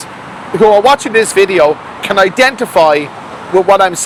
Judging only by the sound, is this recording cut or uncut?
uncut